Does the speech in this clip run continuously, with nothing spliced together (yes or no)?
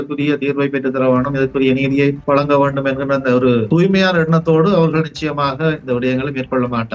no